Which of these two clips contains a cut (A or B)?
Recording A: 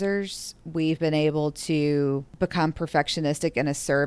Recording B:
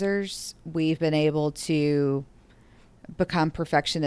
A